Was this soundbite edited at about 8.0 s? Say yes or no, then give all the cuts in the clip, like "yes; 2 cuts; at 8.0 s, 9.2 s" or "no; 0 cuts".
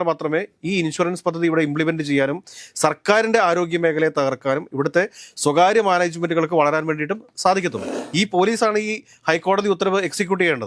yes; 1 cut; at 8.0 s